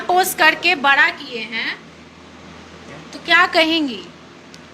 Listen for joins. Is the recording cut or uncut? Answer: uncut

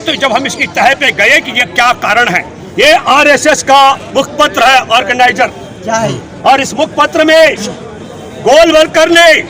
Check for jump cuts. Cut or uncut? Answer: cut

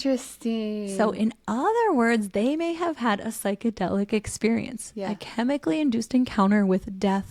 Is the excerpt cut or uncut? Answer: uncut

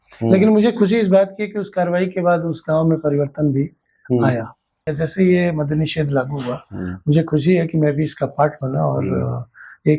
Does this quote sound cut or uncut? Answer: cut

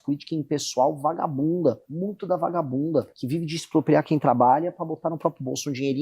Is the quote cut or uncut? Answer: cut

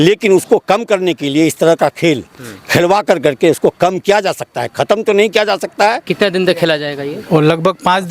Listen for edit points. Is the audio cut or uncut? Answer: cut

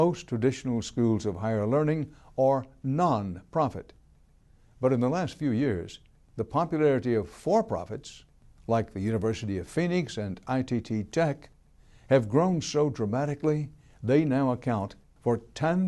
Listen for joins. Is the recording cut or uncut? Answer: cut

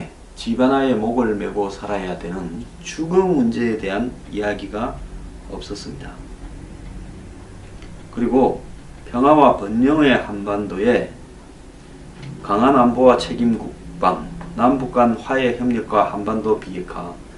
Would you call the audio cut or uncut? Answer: cut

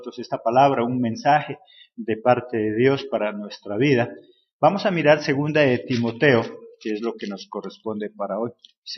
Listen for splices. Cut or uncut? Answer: uncut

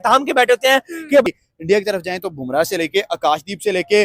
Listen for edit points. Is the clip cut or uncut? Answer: cut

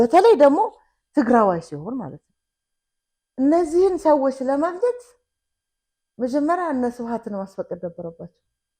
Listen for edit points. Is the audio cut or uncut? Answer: uncut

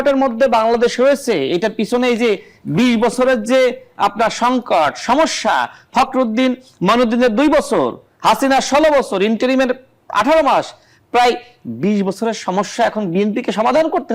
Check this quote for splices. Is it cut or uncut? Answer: uncut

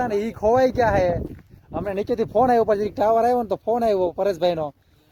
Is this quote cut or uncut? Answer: uncut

